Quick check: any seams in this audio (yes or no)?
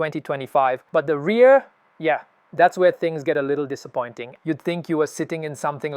yes